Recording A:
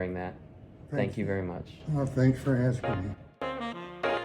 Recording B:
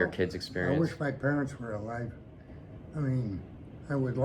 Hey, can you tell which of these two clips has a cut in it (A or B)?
A